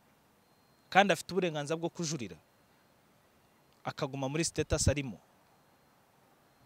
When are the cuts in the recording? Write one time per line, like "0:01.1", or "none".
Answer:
none